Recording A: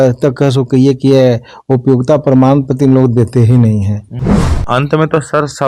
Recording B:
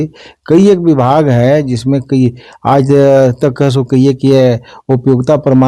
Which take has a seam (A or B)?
A